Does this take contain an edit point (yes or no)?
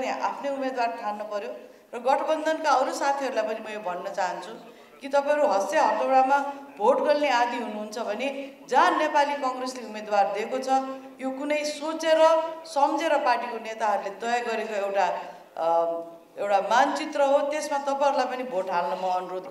no